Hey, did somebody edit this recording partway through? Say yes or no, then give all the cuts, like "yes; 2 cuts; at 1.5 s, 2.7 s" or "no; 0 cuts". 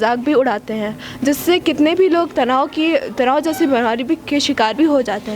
no; 0 cuts